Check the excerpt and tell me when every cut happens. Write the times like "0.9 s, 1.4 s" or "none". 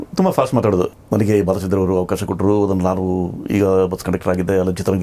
0.9 s